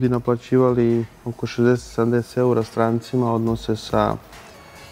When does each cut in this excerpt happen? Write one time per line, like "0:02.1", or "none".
none